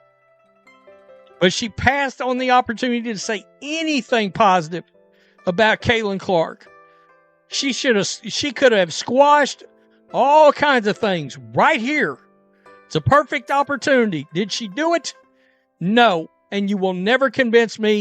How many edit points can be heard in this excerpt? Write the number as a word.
one